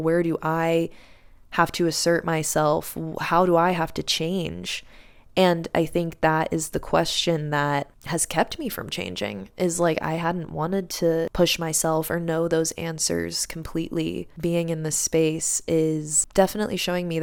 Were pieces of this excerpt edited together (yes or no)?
no